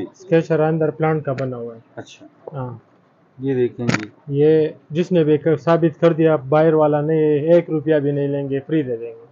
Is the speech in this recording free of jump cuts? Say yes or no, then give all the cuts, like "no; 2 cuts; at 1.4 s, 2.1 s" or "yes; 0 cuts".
yes; 0 cuts